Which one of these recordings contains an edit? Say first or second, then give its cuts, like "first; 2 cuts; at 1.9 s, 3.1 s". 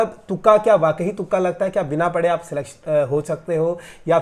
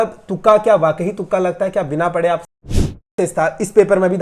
second; 1 cut; at 2.9 s